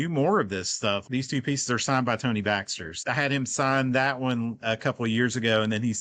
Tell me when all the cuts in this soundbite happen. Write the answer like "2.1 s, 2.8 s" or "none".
1.0 s, 2.9 s